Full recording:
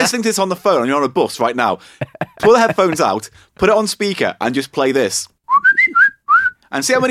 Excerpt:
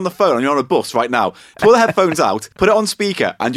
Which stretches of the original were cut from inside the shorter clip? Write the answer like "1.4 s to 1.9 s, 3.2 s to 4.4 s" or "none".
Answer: 1.9 s to 2.2 s, 3.3 s to 3.5 s